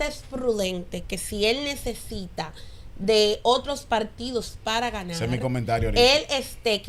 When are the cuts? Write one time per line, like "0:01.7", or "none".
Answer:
none

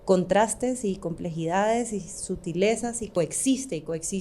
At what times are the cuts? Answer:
0:03.2

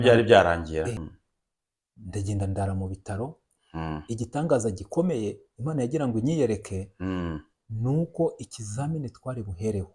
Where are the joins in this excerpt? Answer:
0:01.1

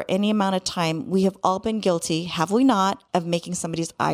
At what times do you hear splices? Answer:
0:03.0

